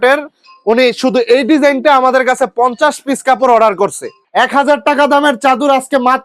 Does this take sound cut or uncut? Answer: cut